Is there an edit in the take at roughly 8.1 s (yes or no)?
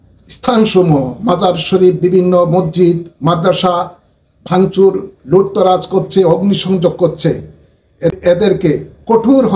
yes